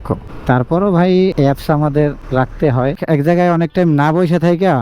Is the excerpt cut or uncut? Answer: cut